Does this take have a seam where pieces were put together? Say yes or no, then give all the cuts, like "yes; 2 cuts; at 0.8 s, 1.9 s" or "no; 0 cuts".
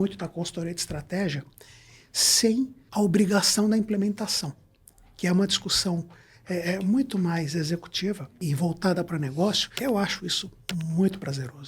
yes; 3 cuts; at 2.8 s, 8.4 s, 9.7 s